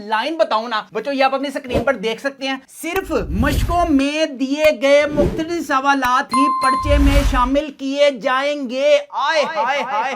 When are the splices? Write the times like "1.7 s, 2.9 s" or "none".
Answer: none